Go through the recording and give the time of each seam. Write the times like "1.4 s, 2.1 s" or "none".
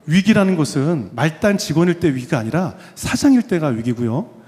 1.1 s